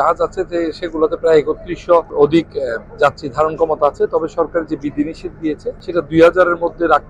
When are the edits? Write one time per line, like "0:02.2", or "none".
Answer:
0:02.1
0:05.8